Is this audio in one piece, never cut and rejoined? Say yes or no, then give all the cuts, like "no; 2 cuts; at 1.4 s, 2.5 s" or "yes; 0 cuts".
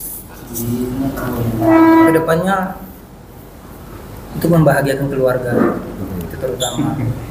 yes; 0 cuts